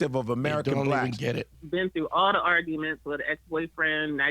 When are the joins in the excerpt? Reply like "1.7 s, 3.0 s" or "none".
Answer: 1.5 s